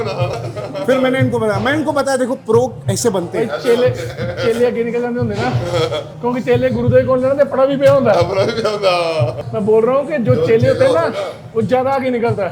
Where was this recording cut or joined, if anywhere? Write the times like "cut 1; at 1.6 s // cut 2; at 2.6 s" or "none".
none